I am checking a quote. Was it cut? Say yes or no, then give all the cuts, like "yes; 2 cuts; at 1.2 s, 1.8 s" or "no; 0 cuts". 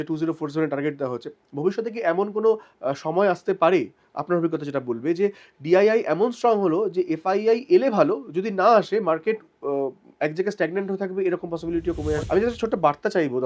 yes; 1 cut; at 12.2 s